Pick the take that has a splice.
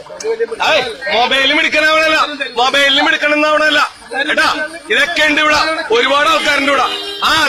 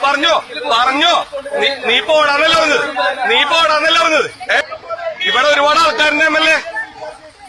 second; 1 cut; at 4.6 s

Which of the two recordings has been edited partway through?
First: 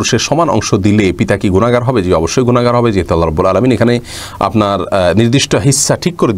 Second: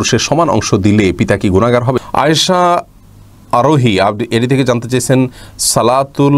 second; 1 cut; at 2.0 s

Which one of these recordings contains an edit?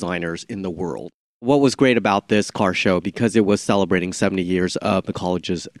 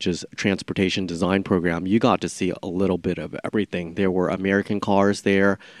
first; 1 cut; at 1.5 s

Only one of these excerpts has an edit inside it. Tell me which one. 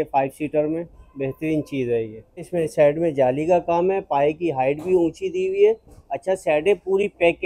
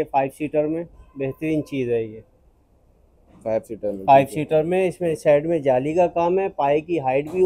first; 1 cut; at 2.5 s

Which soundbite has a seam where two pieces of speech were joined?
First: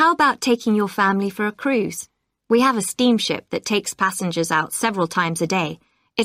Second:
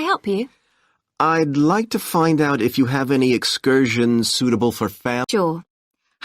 second; 2 cuts; at 1.5 s, 5.2 s

